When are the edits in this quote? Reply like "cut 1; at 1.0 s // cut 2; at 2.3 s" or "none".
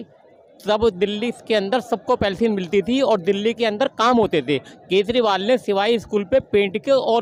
none